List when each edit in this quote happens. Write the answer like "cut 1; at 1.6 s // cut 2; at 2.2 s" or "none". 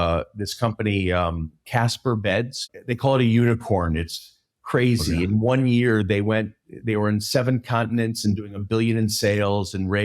cut 1; at 1.6 s // cut 2; at 2.7 s